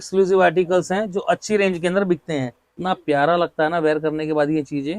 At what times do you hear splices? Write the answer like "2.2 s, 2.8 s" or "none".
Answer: 2.6 s